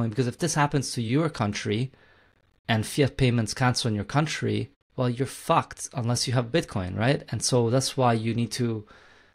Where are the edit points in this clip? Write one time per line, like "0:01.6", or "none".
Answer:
0:04.8